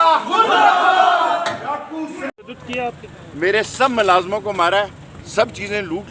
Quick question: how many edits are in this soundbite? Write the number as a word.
one